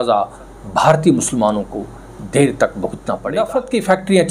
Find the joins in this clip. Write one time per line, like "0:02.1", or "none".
0:03.4